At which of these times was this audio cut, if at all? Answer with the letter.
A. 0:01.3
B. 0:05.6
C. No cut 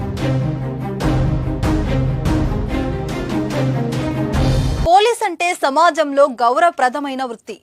A